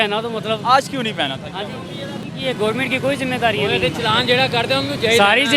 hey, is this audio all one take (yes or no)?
no